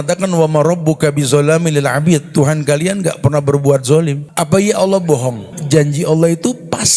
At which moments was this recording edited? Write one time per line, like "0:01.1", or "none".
0:04.2
0:05.5